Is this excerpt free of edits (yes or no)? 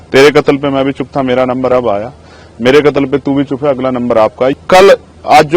no